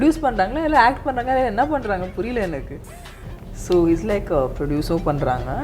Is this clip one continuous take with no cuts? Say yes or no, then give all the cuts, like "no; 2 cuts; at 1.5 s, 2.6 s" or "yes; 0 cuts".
yes; 0 cuts